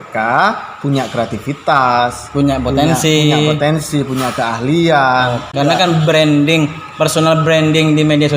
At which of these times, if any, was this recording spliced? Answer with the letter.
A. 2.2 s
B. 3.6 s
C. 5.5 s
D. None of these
C